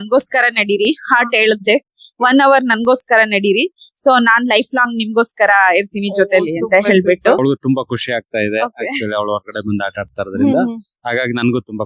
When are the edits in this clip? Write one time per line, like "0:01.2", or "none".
0:07.4